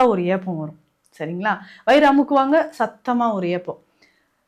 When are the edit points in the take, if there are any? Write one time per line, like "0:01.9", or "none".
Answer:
none